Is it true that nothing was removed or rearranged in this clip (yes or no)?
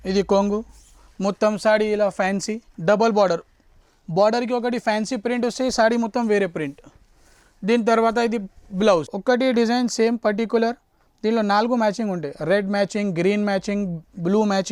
no